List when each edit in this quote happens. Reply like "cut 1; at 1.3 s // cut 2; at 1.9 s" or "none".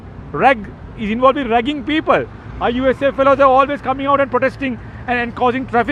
none

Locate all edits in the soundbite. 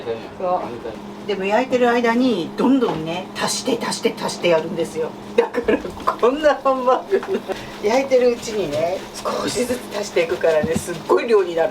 cut 1; at 1.0 s // cut 2; at 7.5 s

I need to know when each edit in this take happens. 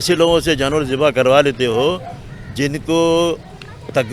none

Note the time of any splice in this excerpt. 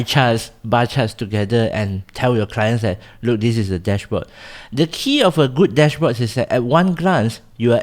none

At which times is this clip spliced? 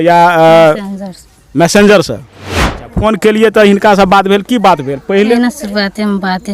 cut 1; at 2.7 s // cut 2; at 5.3 s

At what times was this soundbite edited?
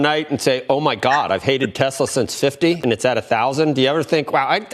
cut 1; at 2.8 s

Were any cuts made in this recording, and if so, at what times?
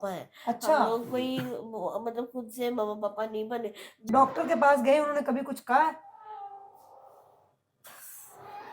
cut 1; at 3.9 s

